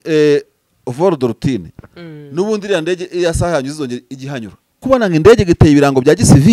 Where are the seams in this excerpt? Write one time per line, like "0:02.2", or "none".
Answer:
0:04.8